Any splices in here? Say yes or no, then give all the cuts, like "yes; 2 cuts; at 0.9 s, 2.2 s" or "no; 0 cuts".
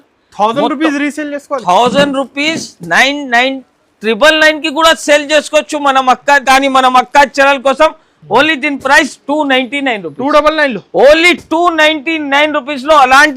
yes; 1 cut; at 6.4 s